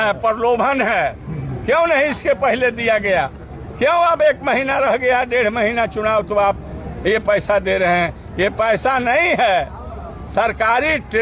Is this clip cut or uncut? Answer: uncut